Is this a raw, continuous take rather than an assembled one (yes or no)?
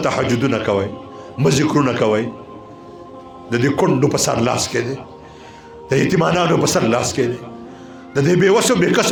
yes